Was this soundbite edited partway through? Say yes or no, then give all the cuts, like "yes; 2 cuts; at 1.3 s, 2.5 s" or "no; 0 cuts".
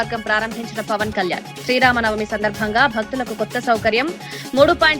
no; 0 cuts